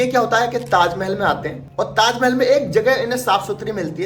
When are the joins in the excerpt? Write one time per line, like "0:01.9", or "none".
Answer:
none